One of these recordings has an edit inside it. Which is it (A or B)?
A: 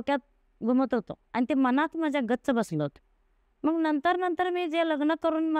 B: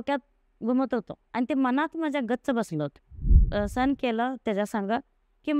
B